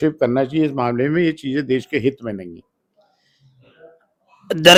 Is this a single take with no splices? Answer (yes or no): yes